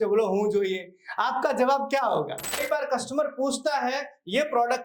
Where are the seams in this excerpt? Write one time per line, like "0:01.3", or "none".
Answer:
0:02.6